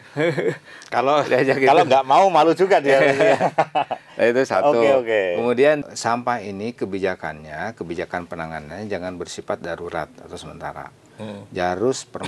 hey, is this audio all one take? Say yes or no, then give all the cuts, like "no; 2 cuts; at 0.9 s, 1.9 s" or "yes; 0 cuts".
no; 1 cut; at 5.8 s